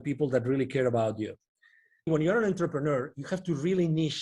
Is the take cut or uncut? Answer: cut